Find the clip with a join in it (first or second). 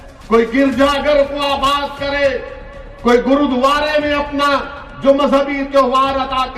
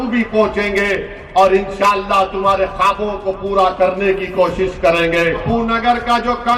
second